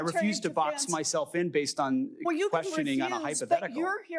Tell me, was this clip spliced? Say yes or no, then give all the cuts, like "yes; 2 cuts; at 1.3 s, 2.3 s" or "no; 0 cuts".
no; 0 cuts